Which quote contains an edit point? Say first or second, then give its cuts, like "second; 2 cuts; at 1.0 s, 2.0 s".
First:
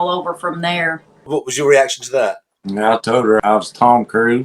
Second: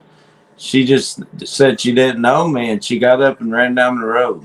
first; 2 cuts; at 1.3 s, 3.4 s